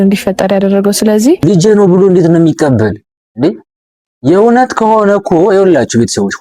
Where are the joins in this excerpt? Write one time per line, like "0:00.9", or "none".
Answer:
0:01.4